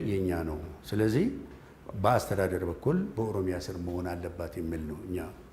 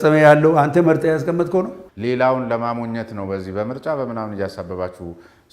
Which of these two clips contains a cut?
second; 1 cut; at 1.8 s

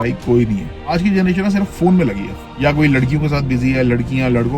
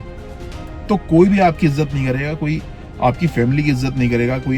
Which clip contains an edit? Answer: first; 2 cuts; at 0.9 s, 2.4 s

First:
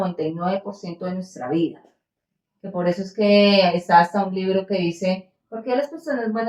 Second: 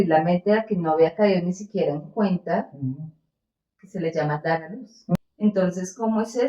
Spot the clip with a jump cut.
second; 1 cut; at 5.2 s

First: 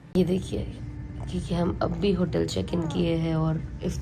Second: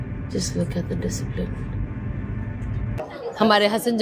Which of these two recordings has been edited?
second; 1 cut; at 3.0 s

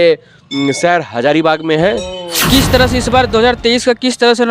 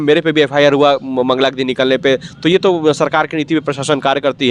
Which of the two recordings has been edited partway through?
first; 1 cut; at 2.5 s

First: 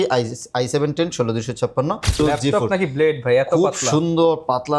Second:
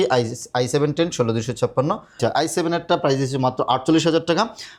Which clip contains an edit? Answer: first; 1 cut; at 2.2 s

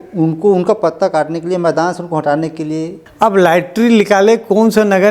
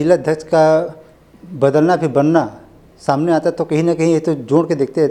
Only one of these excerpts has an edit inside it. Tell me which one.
first; 1 cut; at 3.0 s

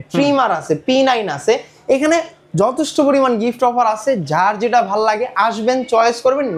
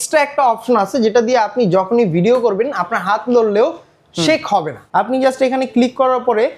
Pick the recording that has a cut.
second; 1 cut; at 4.8 s

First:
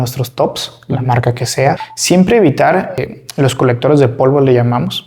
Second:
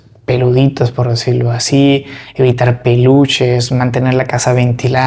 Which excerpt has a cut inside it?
first; 2 cuts; at 1.8 s, 3.0 s

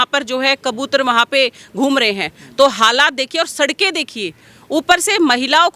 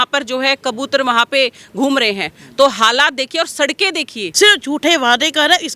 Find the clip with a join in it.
second; 1 cut; at 4.2 s

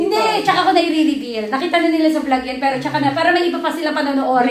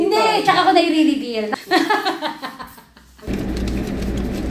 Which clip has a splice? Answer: second; 2 cuts; at 1.5 s, 3.1 s

